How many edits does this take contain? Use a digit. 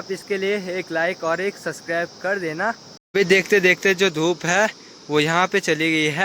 1